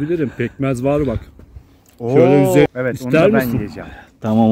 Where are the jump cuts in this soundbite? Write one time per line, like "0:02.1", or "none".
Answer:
0:02.7